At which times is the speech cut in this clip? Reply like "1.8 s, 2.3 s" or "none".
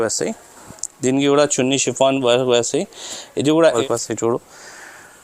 3.8 s